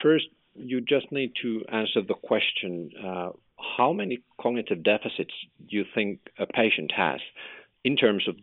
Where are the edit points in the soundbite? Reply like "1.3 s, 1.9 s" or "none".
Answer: none